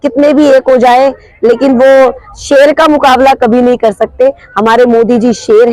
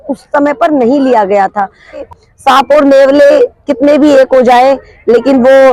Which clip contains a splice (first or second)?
second